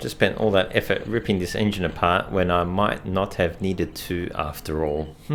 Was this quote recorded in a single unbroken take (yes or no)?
yes